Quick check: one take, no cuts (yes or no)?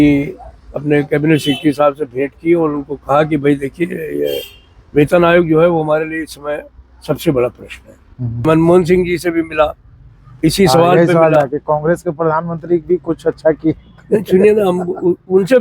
no